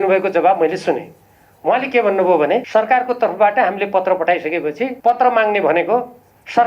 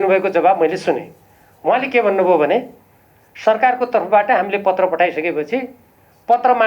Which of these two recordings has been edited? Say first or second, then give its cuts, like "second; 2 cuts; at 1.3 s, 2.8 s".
first; 2 cuts; at 2.7 s, 4.9 s